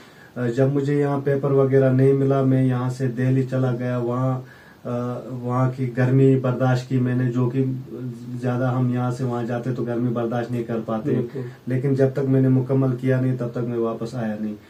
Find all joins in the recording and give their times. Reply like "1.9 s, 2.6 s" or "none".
none

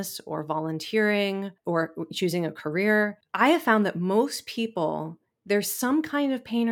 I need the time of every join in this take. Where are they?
1.6 s, 3.2 s

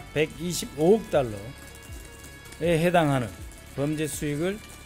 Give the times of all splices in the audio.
none

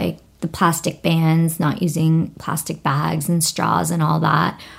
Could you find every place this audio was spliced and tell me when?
none

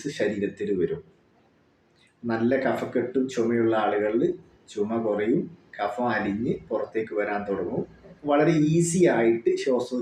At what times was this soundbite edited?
8.1 s

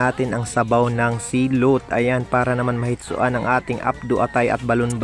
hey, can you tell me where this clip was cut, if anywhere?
none

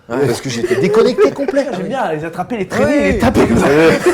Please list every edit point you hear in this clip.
1.8 s

